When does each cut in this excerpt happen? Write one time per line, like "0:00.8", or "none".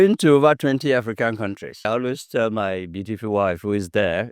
0:01.9